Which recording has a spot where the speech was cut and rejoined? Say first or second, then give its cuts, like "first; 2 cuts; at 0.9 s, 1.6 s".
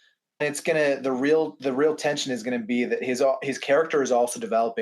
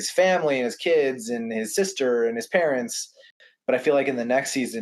second; 1 cut; at 3.3 s